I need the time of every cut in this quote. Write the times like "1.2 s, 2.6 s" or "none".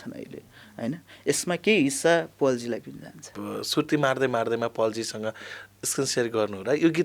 3.4 s